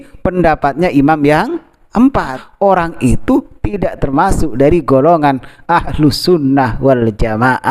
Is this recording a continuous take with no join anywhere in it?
no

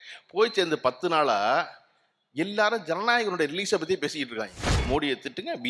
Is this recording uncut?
no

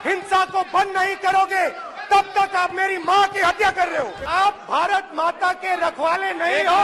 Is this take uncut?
no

